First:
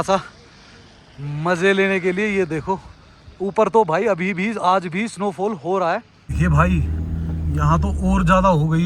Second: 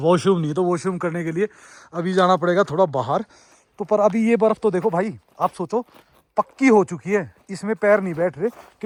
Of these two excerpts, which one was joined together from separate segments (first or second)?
first